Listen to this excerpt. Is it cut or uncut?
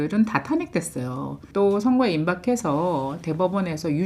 cut